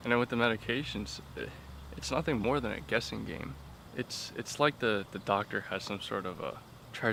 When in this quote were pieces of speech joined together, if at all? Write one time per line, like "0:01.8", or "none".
none